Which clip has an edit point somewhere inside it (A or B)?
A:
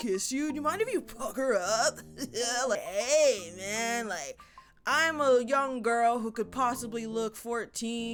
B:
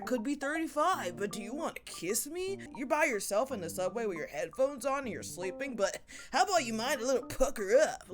B